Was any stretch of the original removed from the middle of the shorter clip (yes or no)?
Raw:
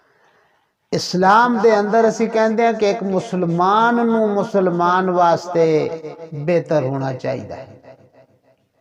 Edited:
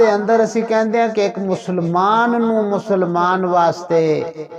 no